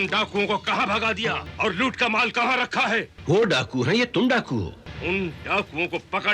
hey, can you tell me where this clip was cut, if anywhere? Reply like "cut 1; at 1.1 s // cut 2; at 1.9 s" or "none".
cut 1; at 1.5 s // cut 2; at 3.1 s // cut 3; at 4.8 s

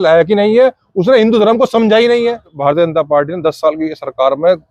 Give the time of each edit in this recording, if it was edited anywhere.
cut 1; at 2.6 s

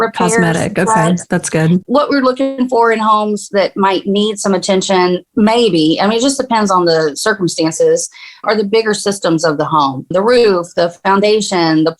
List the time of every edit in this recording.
cut 1; at 1.8 s

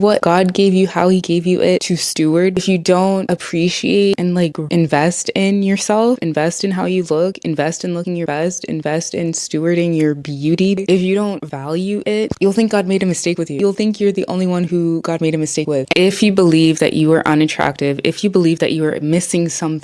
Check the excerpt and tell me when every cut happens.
cut 1; at 2.6 s // cut 2; at 4.1 s // cut 3; at 10.8 s // cut 4; at 13.5 s // cut 5; at 15.9 s

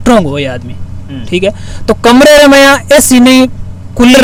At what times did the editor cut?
none

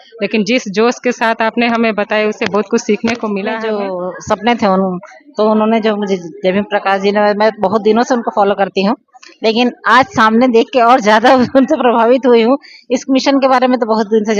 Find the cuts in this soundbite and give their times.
cut 1; at 3.5 s

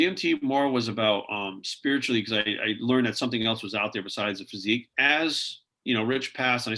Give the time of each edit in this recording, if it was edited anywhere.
cut 1; at 4.9 s

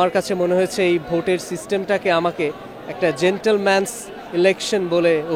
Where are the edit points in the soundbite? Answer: none

